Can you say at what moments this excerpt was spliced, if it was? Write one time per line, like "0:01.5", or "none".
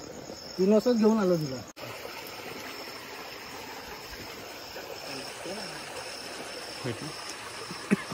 none